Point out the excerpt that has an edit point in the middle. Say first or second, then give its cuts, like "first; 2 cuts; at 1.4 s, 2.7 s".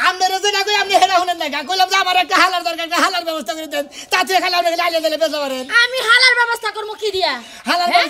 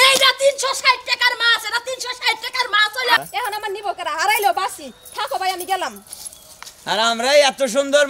second; 1 cut; at 3.2 s